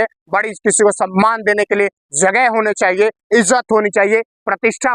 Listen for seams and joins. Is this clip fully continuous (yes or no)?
yes